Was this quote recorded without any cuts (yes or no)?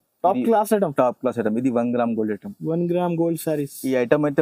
yes